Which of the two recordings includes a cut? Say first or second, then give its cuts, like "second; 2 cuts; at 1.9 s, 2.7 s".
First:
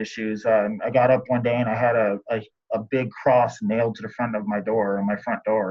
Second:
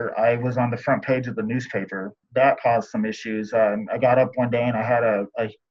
second; 1 cut; at 2.2 s